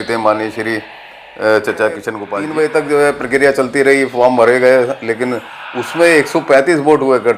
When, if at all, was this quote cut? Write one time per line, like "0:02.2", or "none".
0:02.2